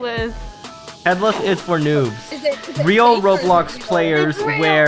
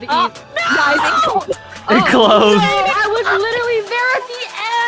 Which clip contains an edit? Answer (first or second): first